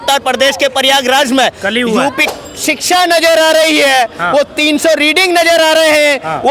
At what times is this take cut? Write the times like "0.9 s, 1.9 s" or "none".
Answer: 2.3 s

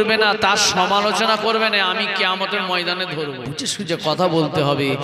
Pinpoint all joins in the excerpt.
3.6 s

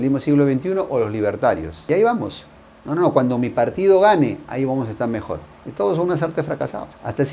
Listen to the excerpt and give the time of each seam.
none

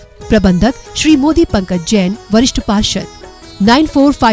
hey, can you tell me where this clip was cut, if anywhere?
none

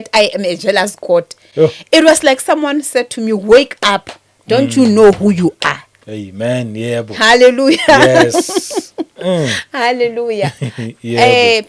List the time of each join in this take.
none

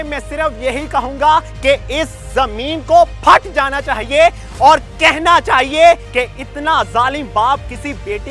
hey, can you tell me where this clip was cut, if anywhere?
1.5 s, 6.1 s

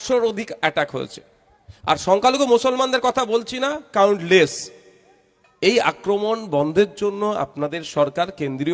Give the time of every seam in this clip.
none

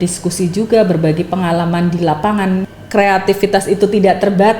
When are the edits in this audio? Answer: 2.7 s

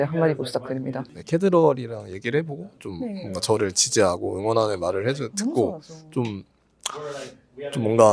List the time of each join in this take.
1.2 s

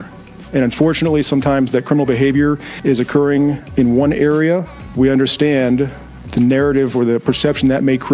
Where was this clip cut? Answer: 2.7 s, 3.6 s, 4.8 s, 6.2 s

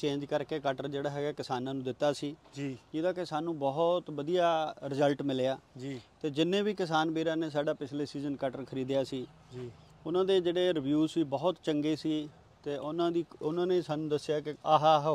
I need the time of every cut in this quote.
none

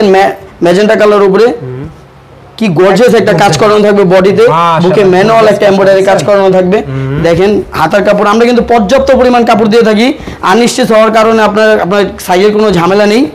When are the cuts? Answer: none

